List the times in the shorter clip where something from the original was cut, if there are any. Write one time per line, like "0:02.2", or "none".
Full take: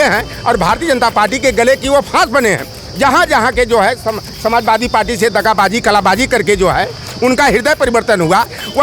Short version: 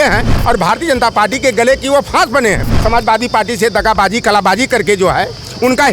0:02.7